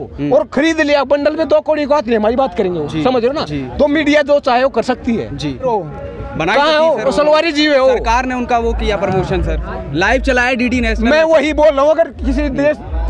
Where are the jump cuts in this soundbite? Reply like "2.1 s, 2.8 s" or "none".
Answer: 5.7 s